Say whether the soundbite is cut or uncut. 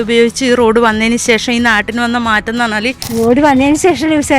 cut